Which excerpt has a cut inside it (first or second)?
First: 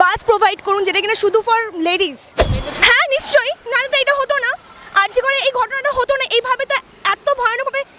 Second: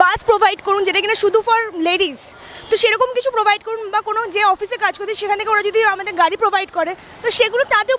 first